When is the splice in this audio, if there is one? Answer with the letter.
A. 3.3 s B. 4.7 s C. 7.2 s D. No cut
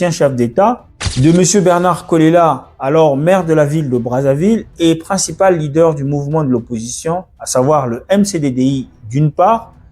D